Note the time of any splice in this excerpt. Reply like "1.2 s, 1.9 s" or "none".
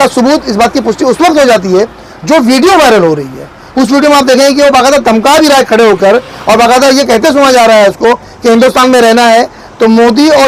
none